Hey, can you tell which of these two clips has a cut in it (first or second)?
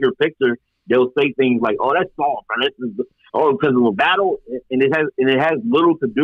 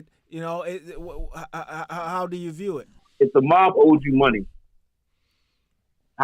second